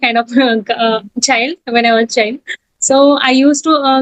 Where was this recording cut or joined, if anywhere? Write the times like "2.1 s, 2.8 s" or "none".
none